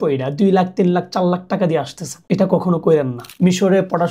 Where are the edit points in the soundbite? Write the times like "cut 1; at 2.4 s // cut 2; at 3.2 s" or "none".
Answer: cut 1; at 3.2 s

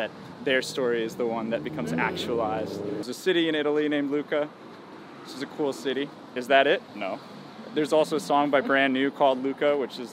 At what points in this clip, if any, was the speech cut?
cut 1; at 3.0 s

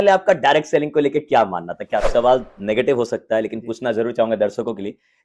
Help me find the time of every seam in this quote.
cut 1; at 2.1 s

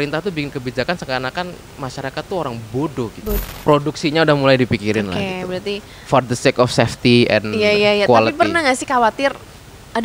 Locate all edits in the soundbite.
cut 1; at 3.4 s

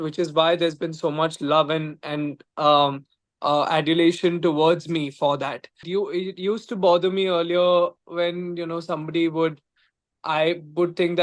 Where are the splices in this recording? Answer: cut 1; at 5.9 s

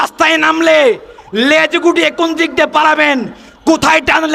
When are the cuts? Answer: none

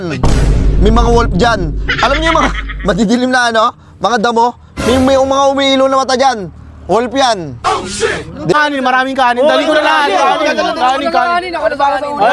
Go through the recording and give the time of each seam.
cut 1; at 8.5 s

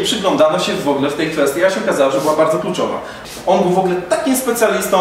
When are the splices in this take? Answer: cut 1; at 3.2 s

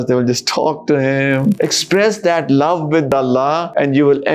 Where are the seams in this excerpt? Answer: cut 1; at 1.6 s

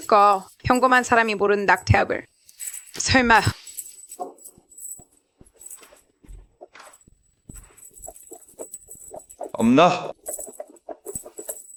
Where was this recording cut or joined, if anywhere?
none

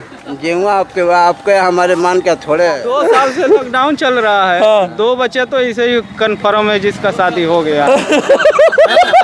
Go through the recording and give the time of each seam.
cut 1; at 2.8 s

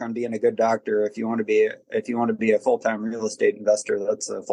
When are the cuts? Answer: none

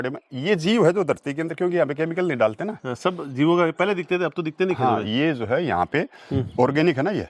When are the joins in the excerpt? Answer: none

